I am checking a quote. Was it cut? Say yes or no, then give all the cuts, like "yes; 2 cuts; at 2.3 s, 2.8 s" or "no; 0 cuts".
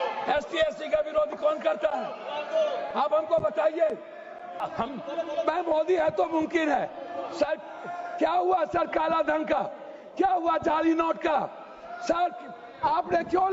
yes; 1 cut; at 4.7 s